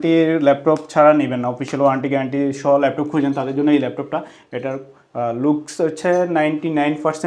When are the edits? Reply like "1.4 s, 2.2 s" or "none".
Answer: none